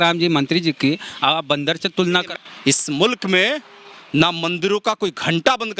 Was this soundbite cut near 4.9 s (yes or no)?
no